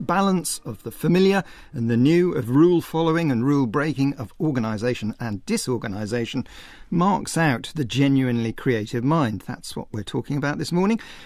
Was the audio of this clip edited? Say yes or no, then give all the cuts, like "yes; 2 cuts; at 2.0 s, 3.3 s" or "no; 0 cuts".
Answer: no; 0 cuts